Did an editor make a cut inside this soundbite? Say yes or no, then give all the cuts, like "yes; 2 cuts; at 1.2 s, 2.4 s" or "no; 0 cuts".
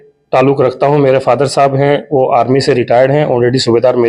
no; 0 cuts